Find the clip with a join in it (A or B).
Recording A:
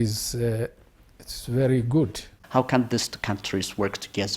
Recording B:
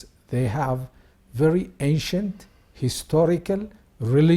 A